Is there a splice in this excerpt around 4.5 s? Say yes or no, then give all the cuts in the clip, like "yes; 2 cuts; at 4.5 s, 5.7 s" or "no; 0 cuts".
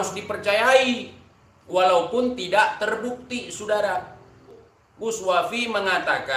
yes; 1 cut; at 4.5 s